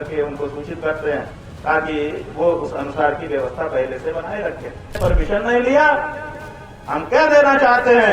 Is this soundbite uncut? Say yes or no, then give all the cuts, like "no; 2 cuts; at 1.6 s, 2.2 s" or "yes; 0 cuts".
no; 1 cut; at 5.0 s